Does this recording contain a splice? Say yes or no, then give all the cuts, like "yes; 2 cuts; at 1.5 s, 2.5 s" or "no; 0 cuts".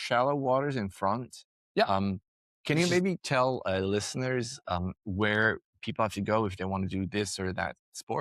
no; 0 cuts